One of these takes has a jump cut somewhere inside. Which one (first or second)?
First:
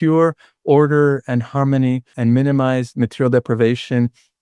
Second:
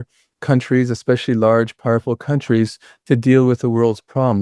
first